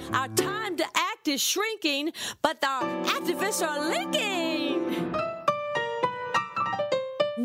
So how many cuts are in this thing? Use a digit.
0